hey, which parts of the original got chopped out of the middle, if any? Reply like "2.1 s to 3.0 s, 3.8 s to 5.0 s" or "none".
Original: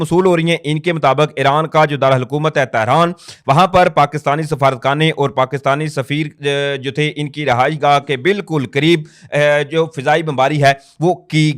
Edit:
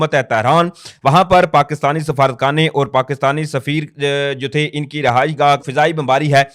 8.1 s to 10.0 s

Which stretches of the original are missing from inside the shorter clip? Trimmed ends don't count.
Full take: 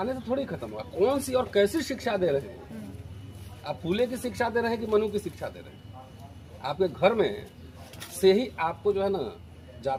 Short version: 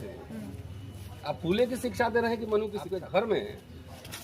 5.2 s to 6.7 s

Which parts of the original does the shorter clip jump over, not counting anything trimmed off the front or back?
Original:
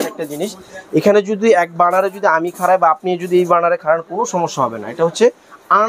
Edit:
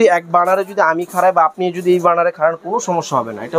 none

